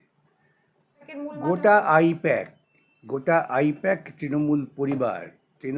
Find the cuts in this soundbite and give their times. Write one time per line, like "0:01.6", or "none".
0:01.1